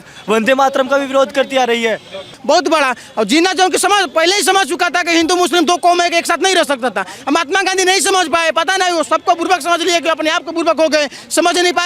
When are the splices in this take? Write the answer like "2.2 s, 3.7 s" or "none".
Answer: 2.3 s